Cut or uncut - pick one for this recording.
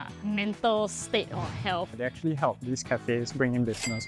cut